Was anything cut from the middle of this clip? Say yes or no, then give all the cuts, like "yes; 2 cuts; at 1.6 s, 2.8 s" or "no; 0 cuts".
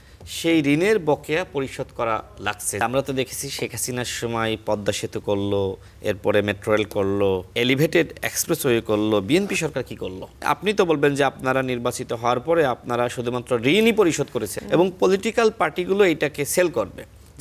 yes; 5 cuts; at 2.8 s, 5.9 s, 7.5 s, 10.4 s, 14.5 s